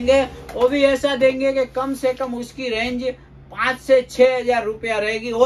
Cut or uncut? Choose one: uncut